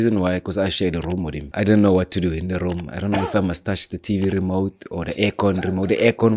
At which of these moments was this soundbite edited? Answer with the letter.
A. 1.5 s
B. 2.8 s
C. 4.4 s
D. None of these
A